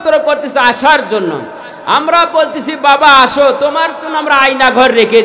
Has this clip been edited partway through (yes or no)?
no